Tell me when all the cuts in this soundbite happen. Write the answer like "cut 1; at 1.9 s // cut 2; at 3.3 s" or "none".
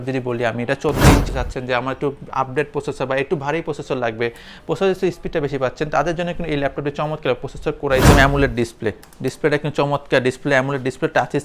cut 1; at 1.3 s // cut 2; at 8.1 s